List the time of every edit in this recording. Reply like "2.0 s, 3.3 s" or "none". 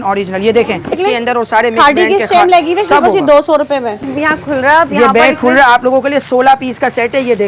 0.9 s, 4.1 s